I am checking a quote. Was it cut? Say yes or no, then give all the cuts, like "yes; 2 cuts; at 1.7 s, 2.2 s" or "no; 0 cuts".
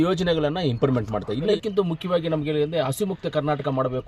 yes; 1 cut; at 1.5 s